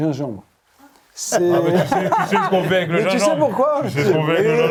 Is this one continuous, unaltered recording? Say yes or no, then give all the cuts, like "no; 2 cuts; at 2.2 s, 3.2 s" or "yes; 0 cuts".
yes; 0 cuts